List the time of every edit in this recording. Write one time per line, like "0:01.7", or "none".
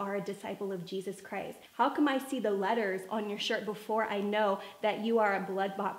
0:01.6